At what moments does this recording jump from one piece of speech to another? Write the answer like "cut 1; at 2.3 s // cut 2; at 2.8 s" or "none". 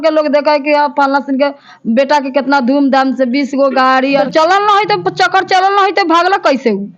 cut 1; at 4.2 s